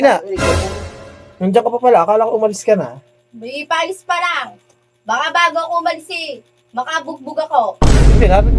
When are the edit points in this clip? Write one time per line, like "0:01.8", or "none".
none